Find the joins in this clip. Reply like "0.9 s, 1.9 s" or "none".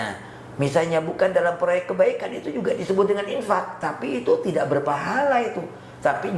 none